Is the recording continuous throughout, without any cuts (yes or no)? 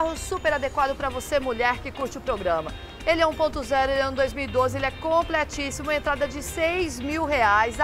yes